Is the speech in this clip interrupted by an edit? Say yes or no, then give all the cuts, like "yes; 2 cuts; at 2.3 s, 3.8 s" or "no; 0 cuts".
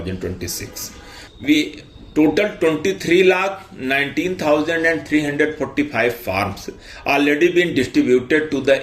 yes; 1 cut; at 1.2 s